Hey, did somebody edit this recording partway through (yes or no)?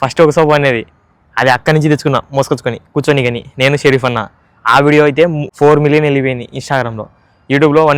yes